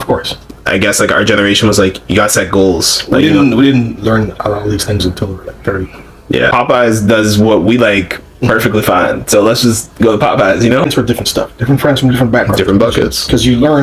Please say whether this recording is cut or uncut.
cut